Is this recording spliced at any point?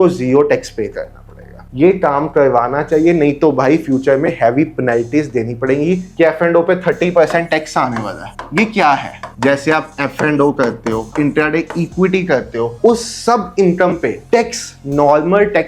yes; 5 cuts; at 1.7 s, 6.1 s, 9.2 s, 11.1 s, 12.7 s

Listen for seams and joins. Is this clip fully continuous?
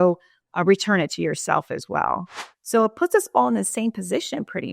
no; 1 cut; at 2.3 s

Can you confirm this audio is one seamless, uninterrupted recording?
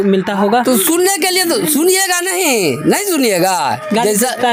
yes; 0 cuts

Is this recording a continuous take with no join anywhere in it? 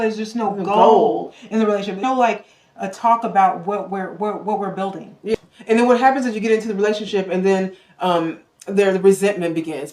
no; 2 cuts; at 2.0 s, 5.3 s

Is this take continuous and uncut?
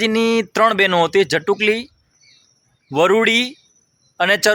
yes; 0 cuts

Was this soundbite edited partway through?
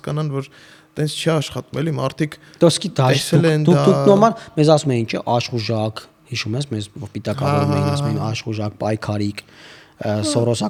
no; 0 cuts

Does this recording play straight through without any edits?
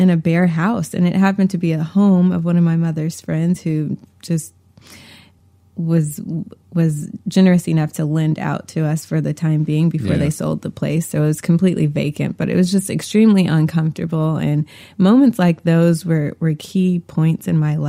yes; 0 cuts

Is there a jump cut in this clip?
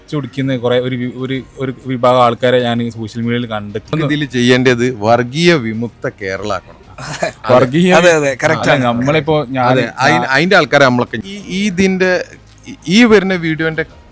yes; 1 cut; at 4.0 s

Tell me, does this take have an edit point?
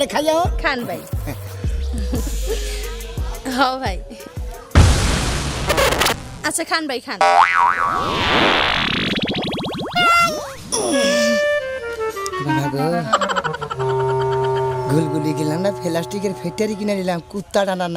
no; 0 cuts

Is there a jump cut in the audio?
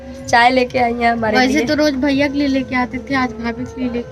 no; 0 cuts

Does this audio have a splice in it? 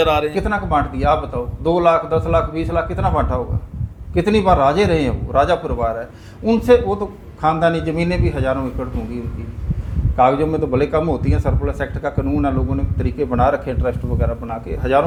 no; 0 cuts

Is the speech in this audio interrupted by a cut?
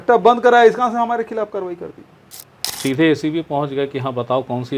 yes; 1 cut; at 2.7 s

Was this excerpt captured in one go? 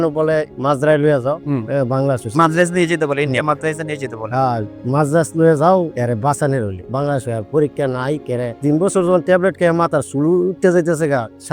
yes; 0 cuts

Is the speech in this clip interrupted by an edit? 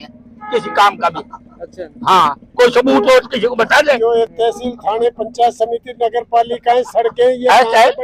no; 0 cuts

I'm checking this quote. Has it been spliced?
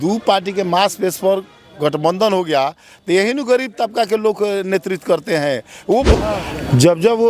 yes; 1 cut; at 6.1 s

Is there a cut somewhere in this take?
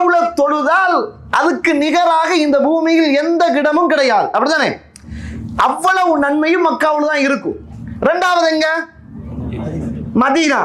no; 0 cuts

